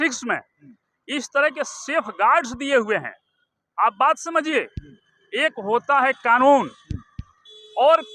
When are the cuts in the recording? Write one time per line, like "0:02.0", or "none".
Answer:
none

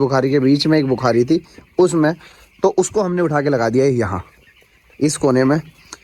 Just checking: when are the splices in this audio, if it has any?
none

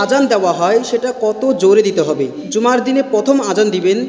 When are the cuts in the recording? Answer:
0:02.4

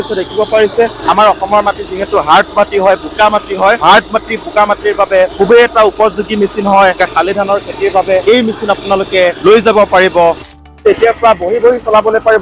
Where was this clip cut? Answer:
0:01.0
0:03.8
0:05.3
0:07.0
0:08.2
0:09.4
0:10.7

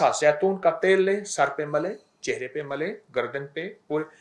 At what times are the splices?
none

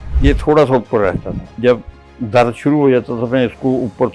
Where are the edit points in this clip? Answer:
0:01.6

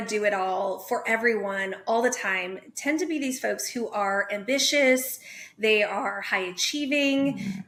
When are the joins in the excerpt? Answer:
none

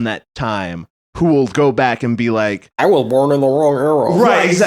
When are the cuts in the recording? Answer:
none

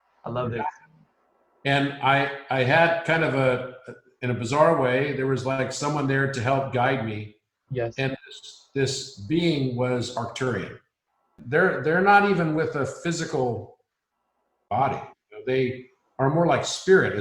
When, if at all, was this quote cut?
0:11.4

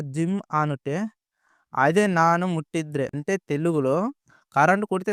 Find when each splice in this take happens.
0:03.2

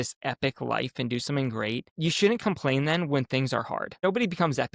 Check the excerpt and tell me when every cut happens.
0:01.9
0:04.0

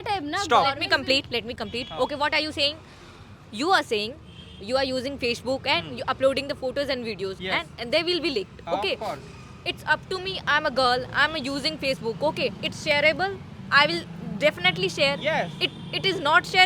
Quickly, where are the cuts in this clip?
none

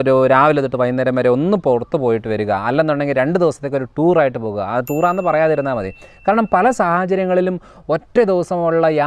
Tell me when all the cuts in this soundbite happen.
none

